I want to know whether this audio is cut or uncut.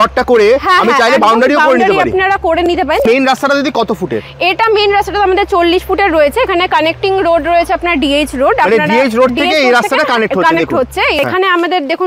cut